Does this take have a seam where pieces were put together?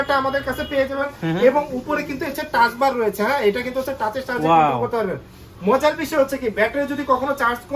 yes; 1 cut; at 1.1 s

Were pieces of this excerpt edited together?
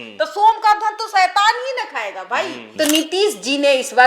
yes; 1 cut; at 2.6 s

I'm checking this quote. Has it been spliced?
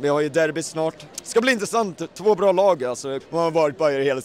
yes; 2 cuts; at 1.1 s, 3.1 s

